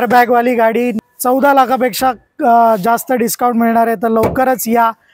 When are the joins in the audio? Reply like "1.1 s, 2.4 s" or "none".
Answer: 1.0 s